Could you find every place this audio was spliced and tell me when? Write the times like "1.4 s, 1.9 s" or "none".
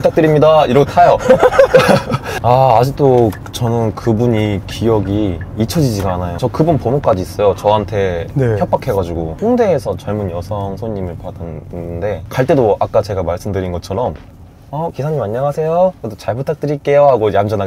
2.3 s, 6.4 s, 12.2 s